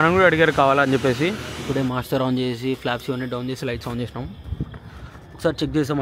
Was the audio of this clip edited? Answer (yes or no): yes